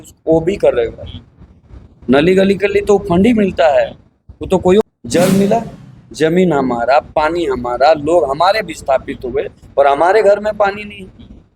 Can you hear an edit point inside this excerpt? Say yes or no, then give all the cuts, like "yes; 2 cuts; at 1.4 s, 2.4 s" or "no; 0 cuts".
yes; 1 cut; at 4.8 s